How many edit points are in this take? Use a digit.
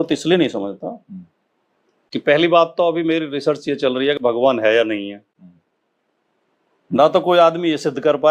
0